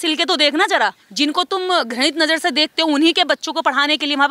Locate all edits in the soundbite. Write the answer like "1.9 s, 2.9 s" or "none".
1.0 s

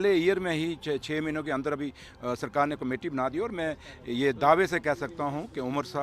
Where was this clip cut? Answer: none

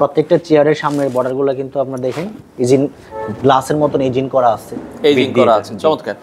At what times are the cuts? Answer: none

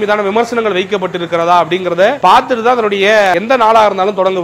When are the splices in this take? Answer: 2.2 s, 3.3 s

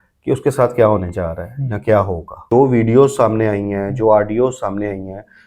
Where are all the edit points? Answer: 2.5 s

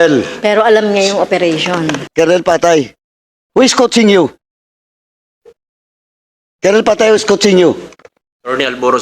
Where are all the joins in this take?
2.0 s

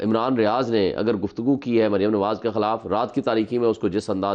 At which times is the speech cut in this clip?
none

